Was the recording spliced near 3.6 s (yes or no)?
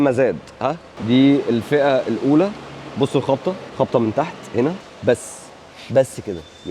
yes